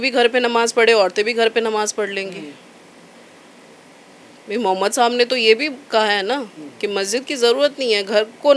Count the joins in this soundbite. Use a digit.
0